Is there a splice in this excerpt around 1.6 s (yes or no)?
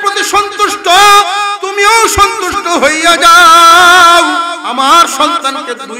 yes